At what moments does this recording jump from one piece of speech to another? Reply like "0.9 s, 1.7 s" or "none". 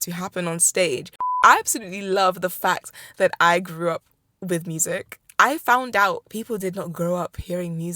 1.3 s, 6.2 s